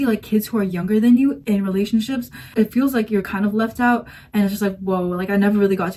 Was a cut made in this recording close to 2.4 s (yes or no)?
no